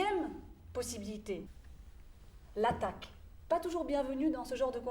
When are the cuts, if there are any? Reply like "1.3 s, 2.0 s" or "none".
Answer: 1.5 s, 3.5 s